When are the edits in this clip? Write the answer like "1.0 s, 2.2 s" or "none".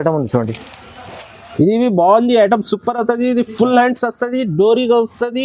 1.4 s